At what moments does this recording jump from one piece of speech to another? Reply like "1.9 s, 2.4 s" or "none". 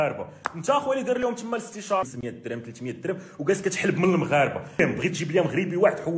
2.0 s, 4.8 s